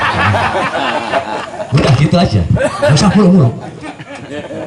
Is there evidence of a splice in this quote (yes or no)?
no